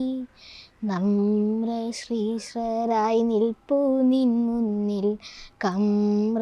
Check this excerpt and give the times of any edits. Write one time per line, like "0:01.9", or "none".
none